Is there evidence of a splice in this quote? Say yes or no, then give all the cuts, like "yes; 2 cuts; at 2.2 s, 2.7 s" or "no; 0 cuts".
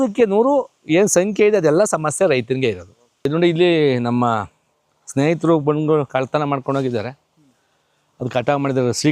yes; 1 cut; at 3.3 s